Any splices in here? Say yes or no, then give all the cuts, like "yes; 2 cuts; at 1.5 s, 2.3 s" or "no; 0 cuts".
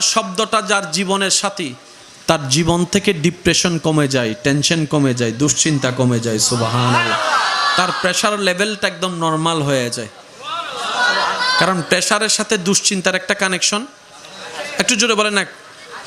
no; 0 cuts